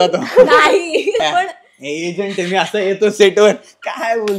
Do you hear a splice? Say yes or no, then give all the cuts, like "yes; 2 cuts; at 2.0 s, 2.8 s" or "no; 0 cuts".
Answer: yes; 1 cut; at 1.2 s